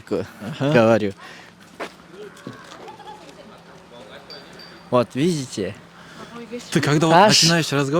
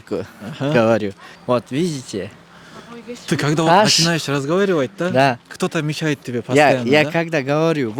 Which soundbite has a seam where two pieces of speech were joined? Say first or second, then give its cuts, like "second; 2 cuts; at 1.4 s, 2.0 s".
second; 1 cut; at 1.3 s